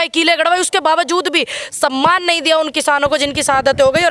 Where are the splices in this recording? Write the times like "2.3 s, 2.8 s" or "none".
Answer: none